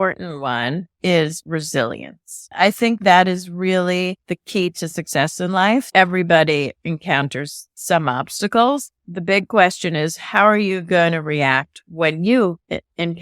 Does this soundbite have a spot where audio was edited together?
yes; 4 cuts; at 0.9 s, 2.5 s, 5.9 s, 9.0 s

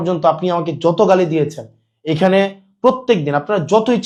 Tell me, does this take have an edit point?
no; 0 cuts

